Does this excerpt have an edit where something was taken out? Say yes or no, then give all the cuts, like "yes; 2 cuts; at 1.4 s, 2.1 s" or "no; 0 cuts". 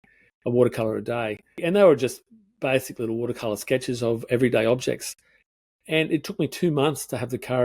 yes; 1 cut; at 1.6 s